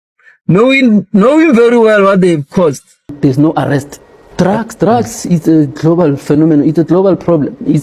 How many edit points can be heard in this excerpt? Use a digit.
1